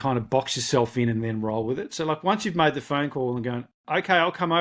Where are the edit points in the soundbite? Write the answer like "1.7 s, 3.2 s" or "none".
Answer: 3.7 s

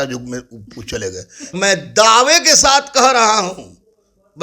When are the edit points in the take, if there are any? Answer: 1.5 s

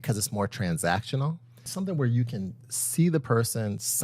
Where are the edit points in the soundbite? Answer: 1.7 s

